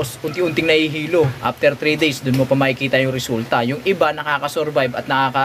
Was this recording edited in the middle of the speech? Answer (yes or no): no